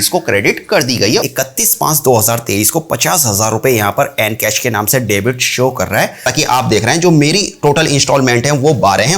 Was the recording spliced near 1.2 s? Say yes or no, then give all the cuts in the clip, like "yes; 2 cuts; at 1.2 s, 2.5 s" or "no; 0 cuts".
yes; 2 cuts; at 1.2 s, 6.2 s